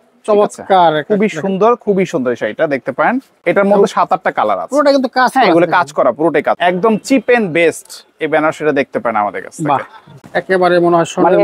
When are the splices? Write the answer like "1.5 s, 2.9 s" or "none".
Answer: 3.4 s, 6.6 s, 10.2 s